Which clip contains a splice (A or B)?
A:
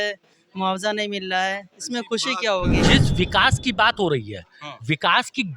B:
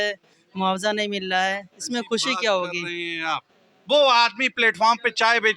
A